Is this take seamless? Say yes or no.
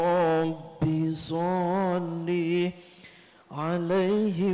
yes